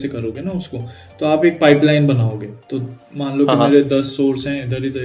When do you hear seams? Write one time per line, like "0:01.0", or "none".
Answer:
none

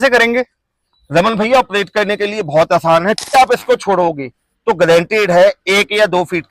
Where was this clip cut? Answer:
0:03.3

